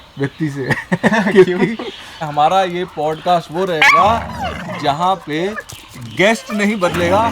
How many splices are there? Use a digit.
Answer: 1